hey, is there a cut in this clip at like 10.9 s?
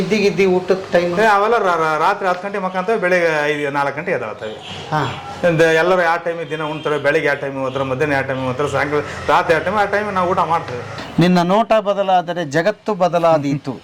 yes; 1 cut; at 10.9 s

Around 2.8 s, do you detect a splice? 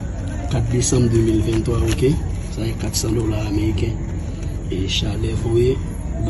no; 0 cuts

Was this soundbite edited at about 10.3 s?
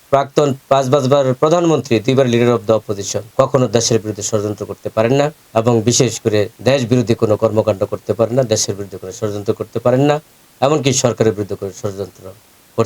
no; 3 cuts; at 3.2 s, 5.4 s, 6.5 s

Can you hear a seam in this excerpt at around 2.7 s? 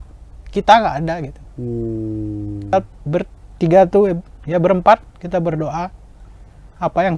yes; 1 cut; at 2.7 s

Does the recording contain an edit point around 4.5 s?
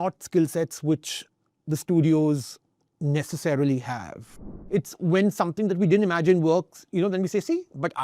yes; 1 cut; at 4.5 s

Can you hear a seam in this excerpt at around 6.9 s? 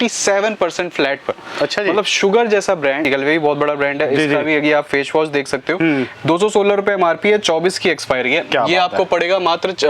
no; 1 cut; at 3.0 s

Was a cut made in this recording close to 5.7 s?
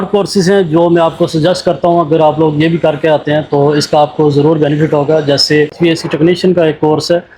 yes; 1 cut; at 5.7 s

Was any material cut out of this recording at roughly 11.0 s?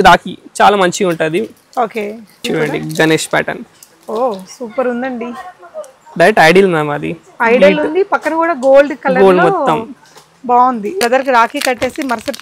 yes; 2 cuts; at 2.4 s, 11.0 s

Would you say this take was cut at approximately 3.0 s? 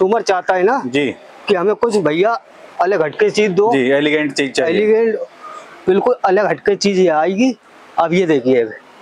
no; 0 cuts

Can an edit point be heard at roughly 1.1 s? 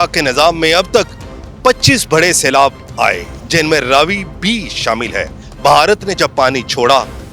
no; 0 cuts

